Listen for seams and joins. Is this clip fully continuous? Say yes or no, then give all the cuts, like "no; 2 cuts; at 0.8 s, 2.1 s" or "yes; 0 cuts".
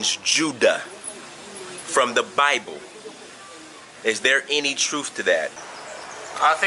no; 1 cut; at 5.6 s